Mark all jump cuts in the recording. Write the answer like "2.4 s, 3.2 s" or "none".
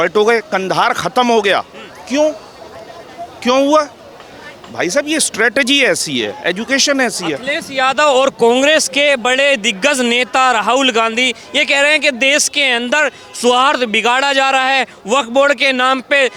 none